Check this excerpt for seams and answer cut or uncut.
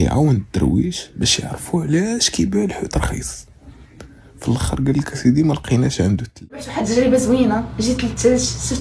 cut